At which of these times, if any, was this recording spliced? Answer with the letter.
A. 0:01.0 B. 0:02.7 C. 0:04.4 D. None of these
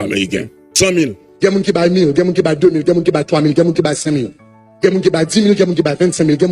A